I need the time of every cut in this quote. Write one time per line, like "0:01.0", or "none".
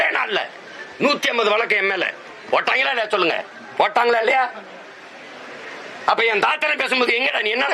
none